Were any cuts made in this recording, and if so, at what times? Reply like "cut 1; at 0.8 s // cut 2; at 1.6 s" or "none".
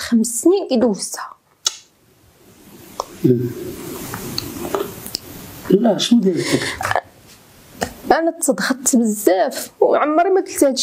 none